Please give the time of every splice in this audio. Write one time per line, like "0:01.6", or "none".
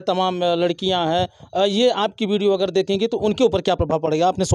none

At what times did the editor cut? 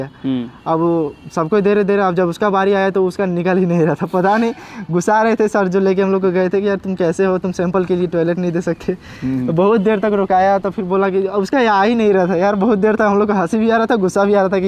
none

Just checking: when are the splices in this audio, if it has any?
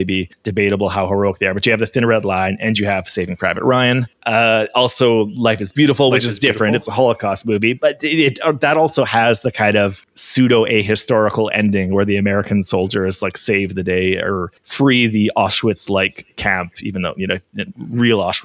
none

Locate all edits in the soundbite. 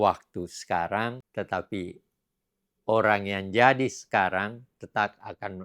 0:01.2

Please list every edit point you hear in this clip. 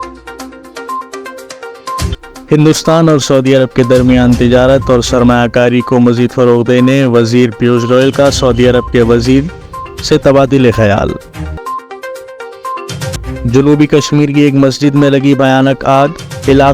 0:02.1

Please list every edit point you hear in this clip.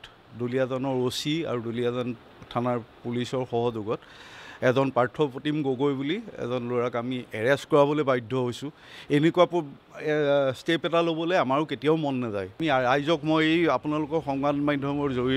0:12.6

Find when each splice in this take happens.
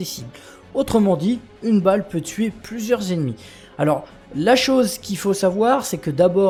none

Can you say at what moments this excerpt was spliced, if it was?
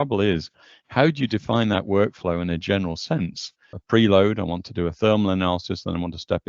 0:03.7

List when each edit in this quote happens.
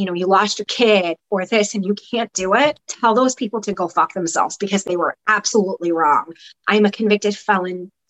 0:02.9

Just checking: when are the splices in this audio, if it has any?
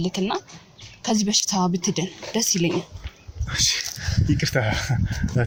none

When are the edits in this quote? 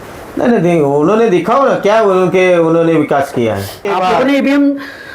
0:03.8

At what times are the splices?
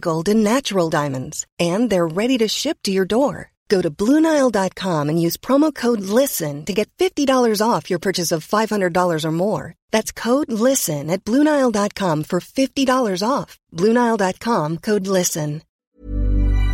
0:15.7

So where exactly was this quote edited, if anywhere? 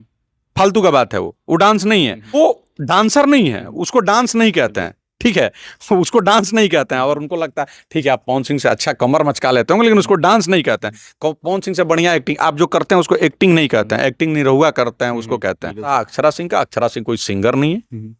0:02.4
0:15.9

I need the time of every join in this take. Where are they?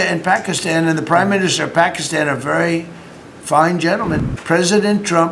0:04.2

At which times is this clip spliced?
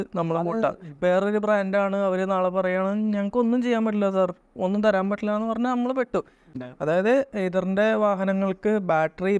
0:06.6

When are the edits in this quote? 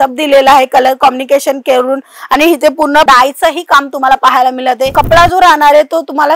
0:04.9

